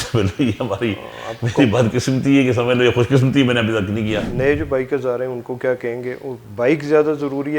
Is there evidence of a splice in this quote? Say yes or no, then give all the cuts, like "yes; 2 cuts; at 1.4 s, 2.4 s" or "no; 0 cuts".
yes; 1 cut; at 4.2 s